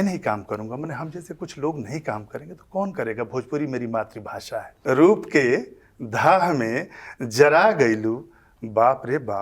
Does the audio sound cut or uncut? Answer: cut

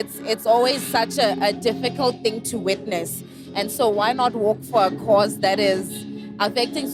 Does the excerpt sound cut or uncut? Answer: uncut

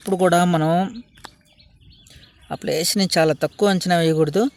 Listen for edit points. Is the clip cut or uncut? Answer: uncut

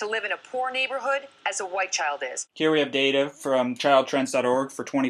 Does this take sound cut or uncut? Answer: uncut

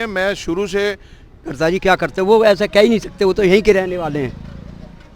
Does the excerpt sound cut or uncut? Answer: cut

